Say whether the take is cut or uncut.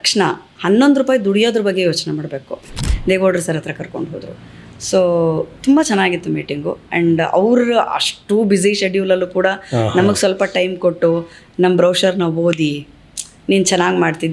cut